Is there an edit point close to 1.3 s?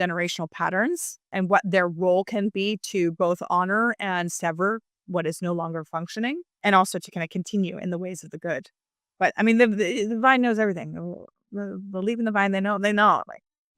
yes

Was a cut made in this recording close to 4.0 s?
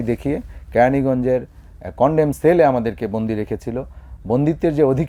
no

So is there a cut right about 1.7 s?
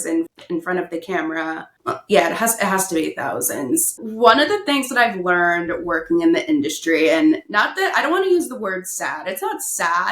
yes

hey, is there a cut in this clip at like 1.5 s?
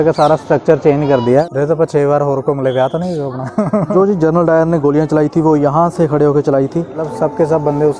yes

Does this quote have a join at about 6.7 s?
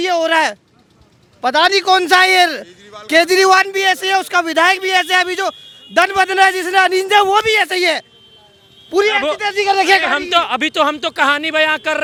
no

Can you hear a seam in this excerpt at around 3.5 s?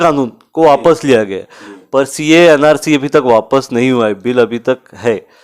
no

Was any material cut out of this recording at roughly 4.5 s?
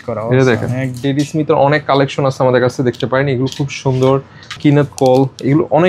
yes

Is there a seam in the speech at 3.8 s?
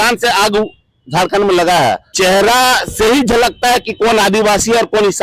no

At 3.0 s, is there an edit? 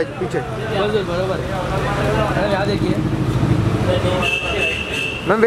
no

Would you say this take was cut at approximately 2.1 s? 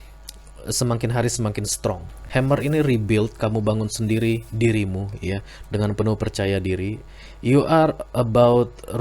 yes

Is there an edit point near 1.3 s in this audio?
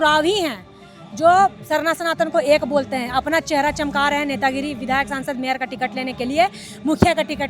no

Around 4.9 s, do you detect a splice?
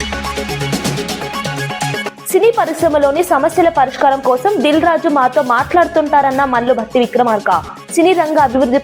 no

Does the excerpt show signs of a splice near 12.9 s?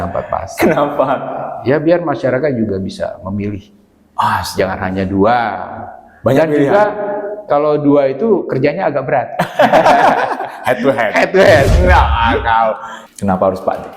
yes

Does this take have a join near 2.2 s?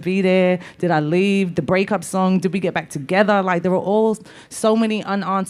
yes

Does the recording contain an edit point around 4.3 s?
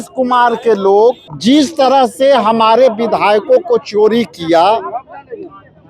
no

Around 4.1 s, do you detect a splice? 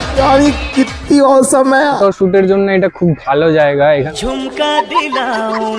yes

